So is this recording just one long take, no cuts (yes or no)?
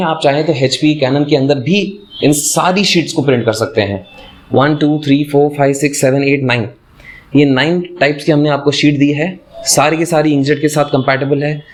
yes